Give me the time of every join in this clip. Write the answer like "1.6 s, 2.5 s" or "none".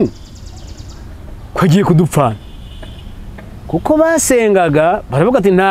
none